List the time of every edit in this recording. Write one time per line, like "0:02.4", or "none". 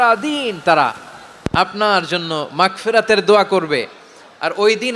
none